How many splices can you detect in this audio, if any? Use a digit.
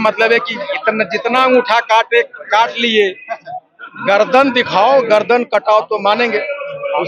0